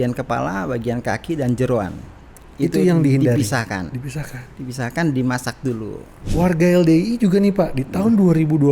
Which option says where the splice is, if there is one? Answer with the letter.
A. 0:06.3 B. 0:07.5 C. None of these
A